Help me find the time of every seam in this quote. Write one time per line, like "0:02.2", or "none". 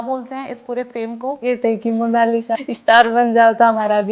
0:01.4
0:02.6